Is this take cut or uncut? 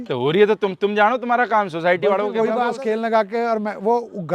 cut